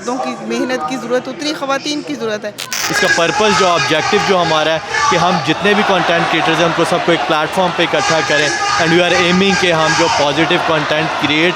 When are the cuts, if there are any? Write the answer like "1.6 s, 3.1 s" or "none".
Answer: 2.9 s